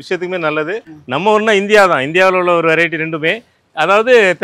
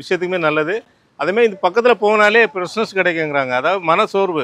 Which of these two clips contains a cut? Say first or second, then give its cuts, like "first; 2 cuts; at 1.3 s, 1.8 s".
first; 1 cut; at 0.9 s